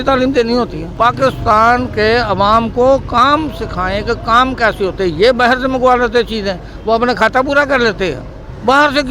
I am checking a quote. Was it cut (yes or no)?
no